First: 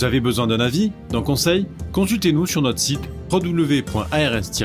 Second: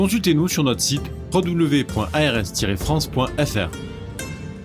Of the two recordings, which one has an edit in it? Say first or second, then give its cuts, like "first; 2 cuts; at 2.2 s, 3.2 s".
second; 1 cut; at 3.7 s